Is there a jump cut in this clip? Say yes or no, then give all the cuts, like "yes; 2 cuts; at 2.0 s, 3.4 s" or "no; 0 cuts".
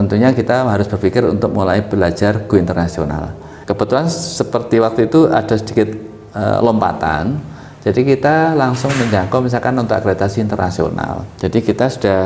yes; 2 cuts; at 3.5 s, 11.2 s